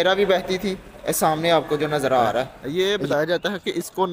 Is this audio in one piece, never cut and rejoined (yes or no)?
no